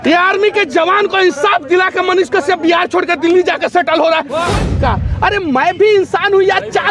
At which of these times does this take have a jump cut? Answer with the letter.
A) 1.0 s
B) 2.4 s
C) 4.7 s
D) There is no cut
C